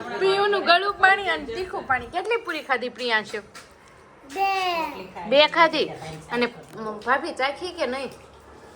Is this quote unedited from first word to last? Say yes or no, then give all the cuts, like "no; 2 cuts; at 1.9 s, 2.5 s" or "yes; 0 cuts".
yes; 0 cuts